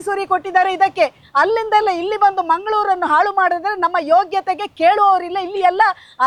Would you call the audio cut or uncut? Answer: uncut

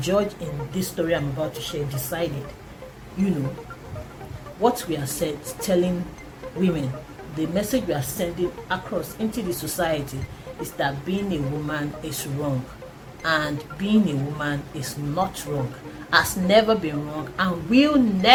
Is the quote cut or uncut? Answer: uncut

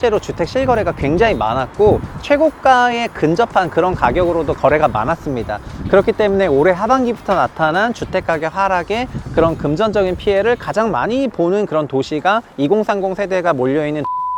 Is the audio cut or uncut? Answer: uncut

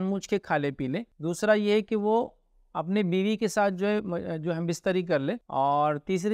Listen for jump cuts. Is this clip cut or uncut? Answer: cut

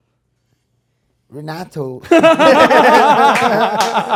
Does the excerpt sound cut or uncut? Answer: uncut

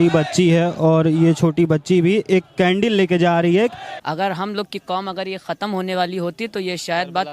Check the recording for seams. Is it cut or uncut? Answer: cut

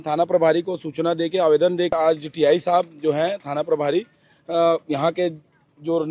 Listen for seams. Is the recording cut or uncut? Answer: cut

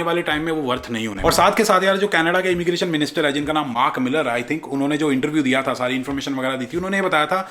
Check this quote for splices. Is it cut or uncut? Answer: uncut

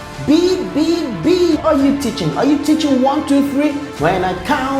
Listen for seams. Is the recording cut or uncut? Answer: cut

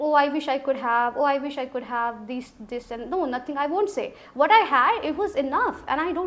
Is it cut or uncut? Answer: uncut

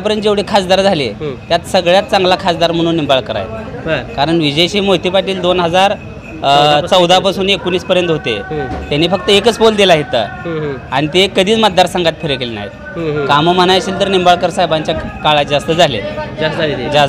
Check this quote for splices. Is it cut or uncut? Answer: uncut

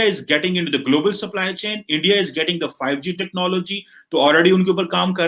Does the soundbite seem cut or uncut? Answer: uncut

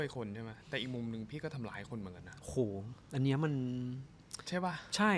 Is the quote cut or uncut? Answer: uncut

